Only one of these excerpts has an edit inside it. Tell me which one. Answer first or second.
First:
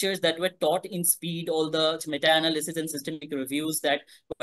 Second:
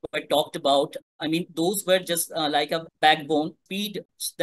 second